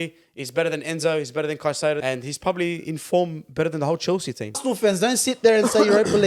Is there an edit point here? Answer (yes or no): yes